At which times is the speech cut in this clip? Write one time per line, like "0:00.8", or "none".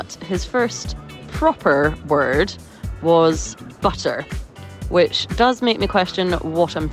none